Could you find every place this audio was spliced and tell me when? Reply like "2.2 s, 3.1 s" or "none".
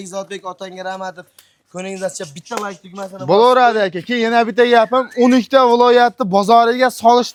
none